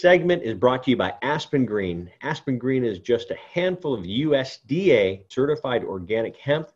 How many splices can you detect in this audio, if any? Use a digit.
1